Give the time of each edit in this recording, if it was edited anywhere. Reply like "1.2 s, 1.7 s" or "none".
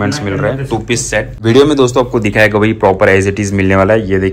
1.3 s